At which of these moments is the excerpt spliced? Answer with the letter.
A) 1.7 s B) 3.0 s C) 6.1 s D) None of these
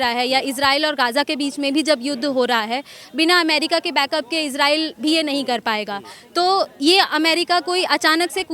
D